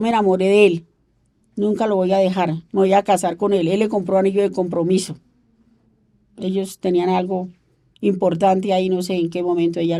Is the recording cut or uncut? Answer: uncut